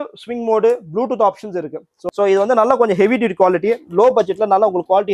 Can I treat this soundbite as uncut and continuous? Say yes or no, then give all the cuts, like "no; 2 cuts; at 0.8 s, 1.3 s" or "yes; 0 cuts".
no; 1 cut; at 2.0 s